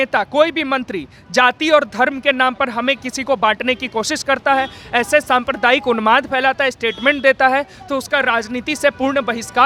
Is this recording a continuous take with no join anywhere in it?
yes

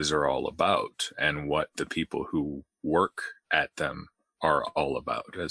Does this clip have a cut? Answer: no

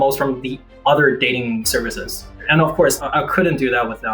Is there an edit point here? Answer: yes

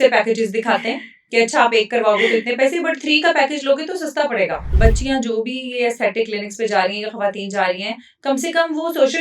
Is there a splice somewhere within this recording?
yes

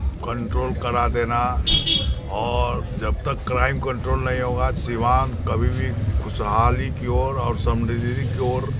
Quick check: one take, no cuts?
yes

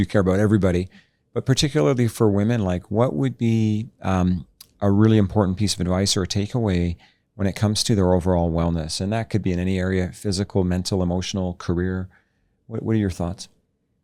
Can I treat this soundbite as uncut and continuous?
yes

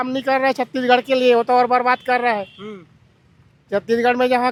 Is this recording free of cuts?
yes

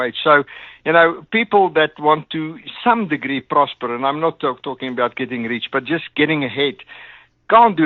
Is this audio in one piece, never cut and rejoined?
yes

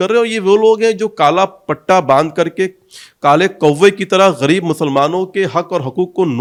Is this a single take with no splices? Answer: yes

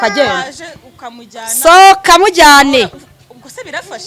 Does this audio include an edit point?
no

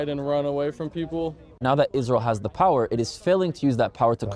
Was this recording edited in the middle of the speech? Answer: yes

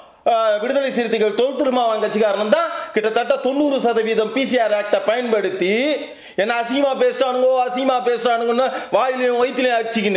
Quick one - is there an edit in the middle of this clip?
no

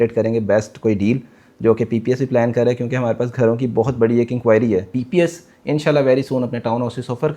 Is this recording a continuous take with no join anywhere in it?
no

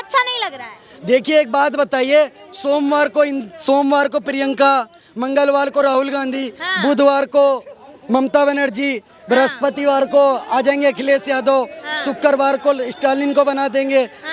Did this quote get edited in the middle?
no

